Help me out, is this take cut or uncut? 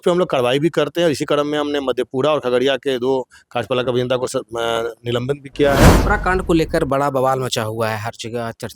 cut